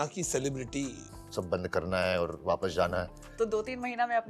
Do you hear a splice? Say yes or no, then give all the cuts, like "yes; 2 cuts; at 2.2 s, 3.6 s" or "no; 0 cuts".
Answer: yes; 2 cuts; at 1.1 s, 3.2 s